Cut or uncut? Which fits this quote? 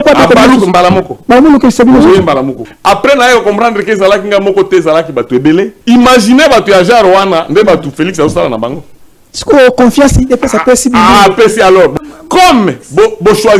cut